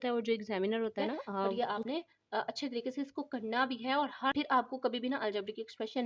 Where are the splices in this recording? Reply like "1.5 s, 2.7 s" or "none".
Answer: 1.5 s, 4.3 s

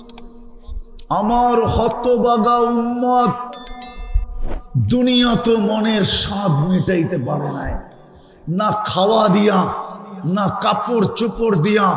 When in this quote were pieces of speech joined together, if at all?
none

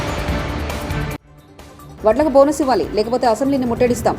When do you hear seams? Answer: 1.3 s

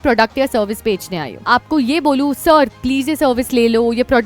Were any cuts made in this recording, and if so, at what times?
1.4 s

